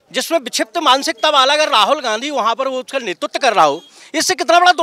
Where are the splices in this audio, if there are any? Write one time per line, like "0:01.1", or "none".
none